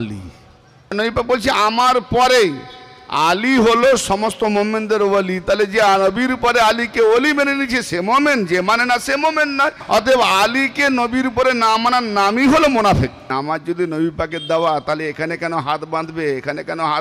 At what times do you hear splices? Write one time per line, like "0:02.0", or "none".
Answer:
0:00.9
0:09.8
0:13.3